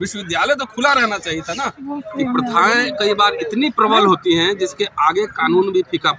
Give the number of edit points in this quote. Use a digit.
1